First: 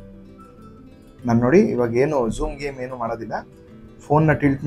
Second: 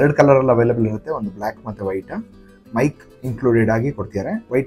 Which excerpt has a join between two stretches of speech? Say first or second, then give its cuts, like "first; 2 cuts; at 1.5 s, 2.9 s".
second; 1 cut; at 2.6 s